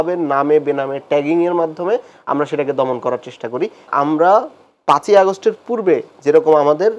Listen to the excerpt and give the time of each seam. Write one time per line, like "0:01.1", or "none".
0:03.9